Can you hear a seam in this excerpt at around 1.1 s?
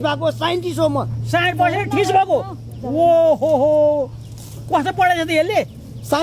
no; 0 cuts

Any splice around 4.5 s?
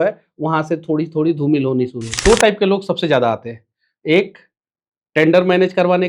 no; 1 cut; at 2.0 s

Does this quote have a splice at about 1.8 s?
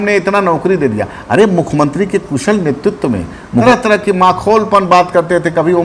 no; 1 cut; at 3.6 s

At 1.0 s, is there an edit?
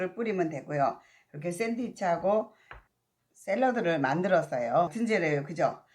no; 1 cut; at 4.9 s

